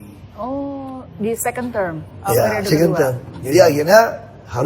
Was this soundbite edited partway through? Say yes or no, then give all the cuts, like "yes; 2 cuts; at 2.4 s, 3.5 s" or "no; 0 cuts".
no; 0 cuts